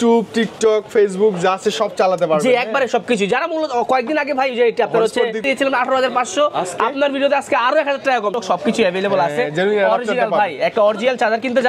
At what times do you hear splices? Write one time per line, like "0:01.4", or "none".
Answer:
0:05.4
0:08.3